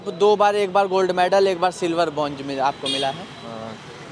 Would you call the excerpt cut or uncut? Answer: uncut